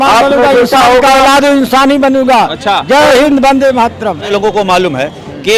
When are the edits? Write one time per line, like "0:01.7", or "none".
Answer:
0:04.3